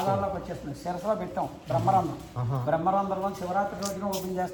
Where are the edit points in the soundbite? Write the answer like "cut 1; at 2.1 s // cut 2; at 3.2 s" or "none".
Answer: none

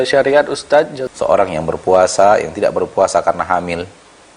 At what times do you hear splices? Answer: cut 1; at 1.0 s

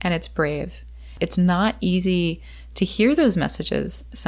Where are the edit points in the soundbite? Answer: cut 1; at 1.1 s

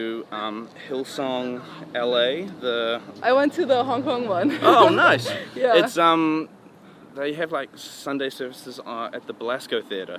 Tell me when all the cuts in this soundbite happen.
none

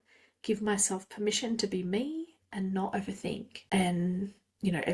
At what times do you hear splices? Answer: cut 1; at 3.5 s

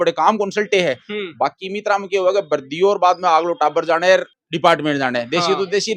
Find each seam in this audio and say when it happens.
none

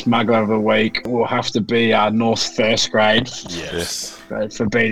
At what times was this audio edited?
cut 1; at 1.0 s

